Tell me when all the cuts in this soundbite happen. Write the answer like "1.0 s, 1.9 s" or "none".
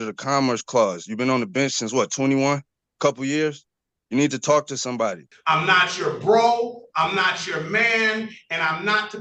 5.3 s